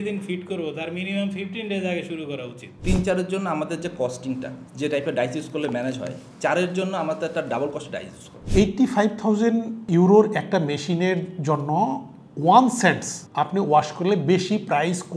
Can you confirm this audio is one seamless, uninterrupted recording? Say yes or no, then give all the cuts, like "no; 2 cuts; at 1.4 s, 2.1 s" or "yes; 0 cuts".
no; 2 cuts; at 2.8 s, 8.4 s